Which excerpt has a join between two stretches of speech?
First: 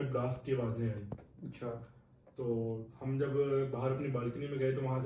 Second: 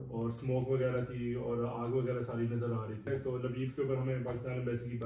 second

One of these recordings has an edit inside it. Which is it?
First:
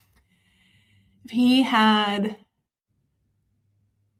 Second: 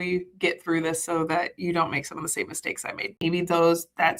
second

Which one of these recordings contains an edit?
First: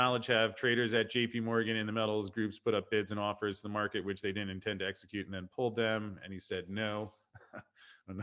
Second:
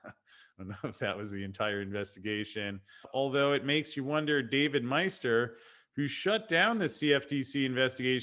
second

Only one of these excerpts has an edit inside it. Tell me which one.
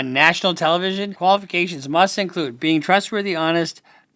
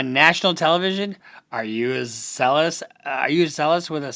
first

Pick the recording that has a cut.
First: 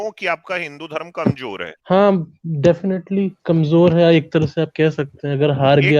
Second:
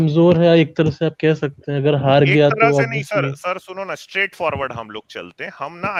first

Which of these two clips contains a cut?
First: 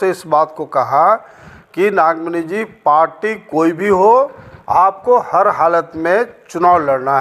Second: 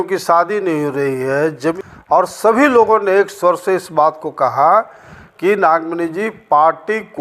second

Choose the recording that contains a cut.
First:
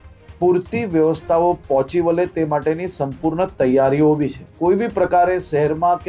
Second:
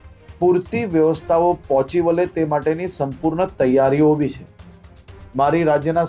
first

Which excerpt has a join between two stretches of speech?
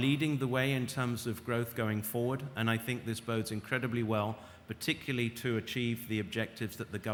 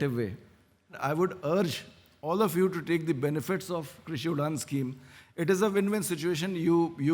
second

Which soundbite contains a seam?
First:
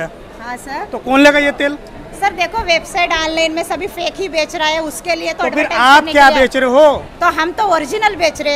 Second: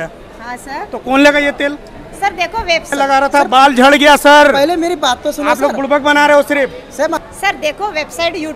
second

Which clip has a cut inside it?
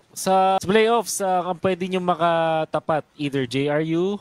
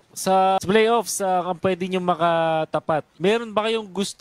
second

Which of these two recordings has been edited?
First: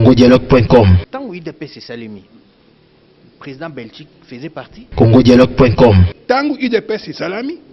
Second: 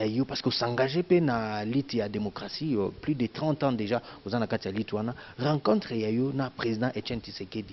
first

